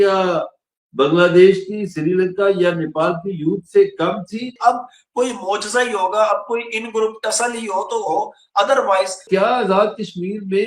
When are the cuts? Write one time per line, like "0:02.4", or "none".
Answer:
0:04.6
0:09.2